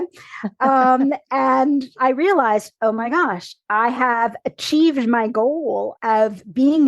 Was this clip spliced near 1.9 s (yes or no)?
yes